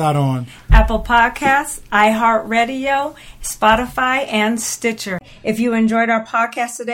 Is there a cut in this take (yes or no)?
yes